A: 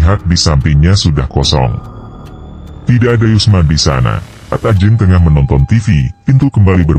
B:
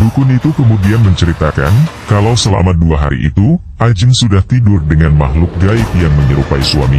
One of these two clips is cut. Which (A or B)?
A